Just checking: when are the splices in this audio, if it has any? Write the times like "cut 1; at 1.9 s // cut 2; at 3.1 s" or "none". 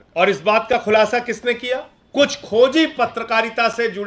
cut 1; at 2.0 s